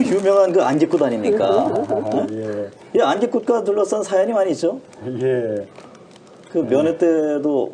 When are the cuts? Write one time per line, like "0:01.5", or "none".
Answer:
0:05.8